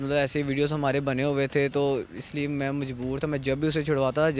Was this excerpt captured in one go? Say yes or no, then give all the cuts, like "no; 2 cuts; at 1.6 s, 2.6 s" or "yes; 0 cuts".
yes; 0 cuts